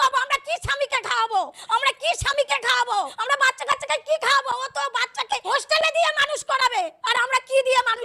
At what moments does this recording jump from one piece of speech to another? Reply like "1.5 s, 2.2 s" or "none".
1.6 s, 3.2 s, 5.4 s, 7.0 s